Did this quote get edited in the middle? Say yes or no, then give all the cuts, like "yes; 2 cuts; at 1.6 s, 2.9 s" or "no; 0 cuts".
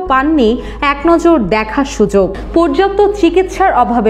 yes; 1 cut; at 2.4 s